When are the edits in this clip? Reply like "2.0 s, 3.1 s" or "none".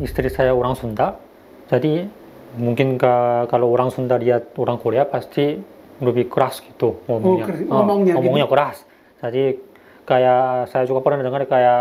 none